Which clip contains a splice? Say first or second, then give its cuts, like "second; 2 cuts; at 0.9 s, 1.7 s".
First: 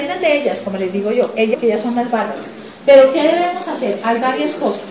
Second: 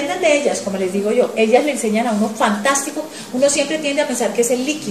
second; 1 cut; at 1.5 s